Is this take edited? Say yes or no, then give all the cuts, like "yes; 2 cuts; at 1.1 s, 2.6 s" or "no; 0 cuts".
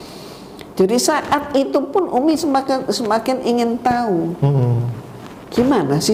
no; 0 cuts